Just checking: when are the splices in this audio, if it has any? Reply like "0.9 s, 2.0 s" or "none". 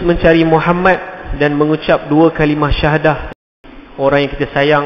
3.4 s